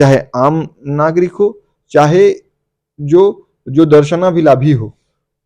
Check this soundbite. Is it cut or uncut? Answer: uncut